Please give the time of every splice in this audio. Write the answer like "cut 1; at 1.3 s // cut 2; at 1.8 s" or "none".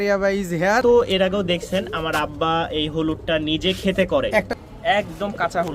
cut 1; at 0.8 s // cut 2; at 4.5 s